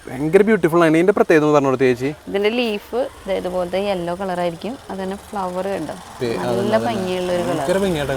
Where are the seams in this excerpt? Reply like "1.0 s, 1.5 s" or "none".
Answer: none